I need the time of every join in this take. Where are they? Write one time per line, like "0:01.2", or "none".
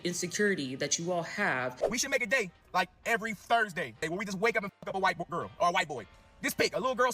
0:01.7
0:04.0